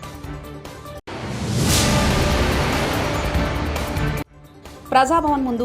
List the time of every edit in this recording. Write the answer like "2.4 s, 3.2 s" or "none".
0.9 s